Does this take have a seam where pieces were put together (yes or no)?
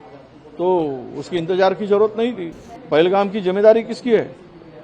yes